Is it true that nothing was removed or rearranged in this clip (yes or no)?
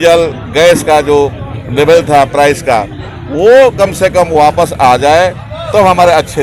yes